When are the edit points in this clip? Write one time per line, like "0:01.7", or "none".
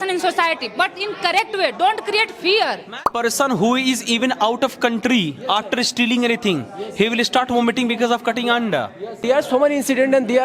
0:03.1
0:09.2